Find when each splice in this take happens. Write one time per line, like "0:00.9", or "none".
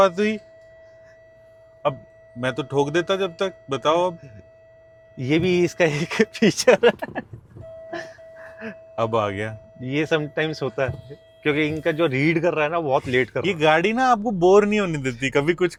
none